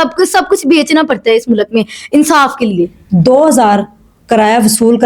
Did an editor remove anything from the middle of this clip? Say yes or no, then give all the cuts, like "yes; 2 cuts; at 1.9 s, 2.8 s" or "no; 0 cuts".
yes; 1 cut; at 3.0 s